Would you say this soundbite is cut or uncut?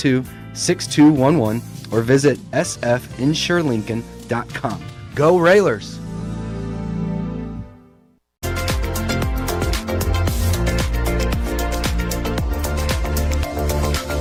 uncut